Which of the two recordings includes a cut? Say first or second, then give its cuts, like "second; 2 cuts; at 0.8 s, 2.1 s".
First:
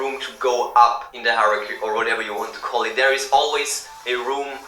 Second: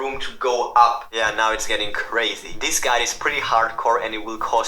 second; 2 cuts; at 1.1 s, 2.5 s